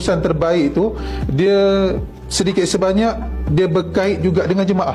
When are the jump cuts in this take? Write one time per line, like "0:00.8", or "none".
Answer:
none